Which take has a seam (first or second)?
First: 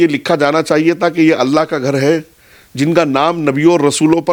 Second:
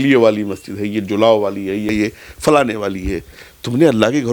second